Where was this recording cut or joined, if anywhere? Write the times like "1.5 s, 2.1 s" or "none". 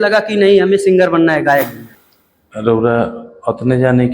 1.8 s